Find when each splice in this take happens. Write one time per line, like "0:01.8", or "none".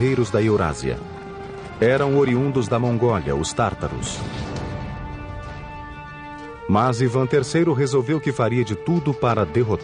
0:08.5